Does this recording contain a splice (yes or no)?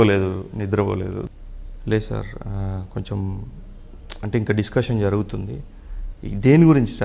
yes